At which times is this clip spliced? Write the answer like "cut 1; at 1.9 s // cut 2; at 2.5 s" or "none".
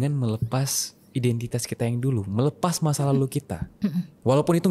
none